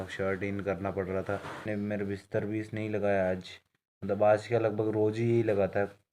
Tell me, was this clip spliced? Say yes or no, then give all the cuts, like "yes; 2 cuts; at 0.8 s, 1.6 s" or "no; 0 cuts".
yes; 1 cut; at 1.6 s